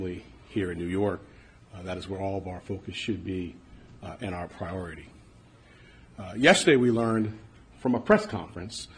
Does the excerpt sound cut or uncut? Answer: cut